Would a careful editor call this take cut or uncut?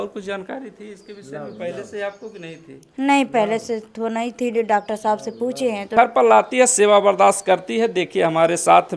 cut